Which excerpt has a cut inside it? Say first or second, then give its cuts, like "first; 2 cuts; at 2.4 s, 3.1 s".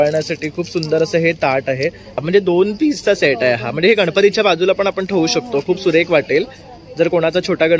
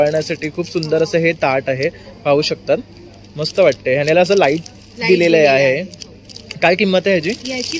first; 1 cut; at 2.2 s